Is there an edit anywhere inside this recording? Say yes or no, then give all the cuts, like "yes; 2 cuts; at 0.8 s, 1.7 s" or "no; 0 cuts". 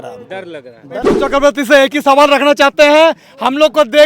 yes; 1 cut; at 1.2 s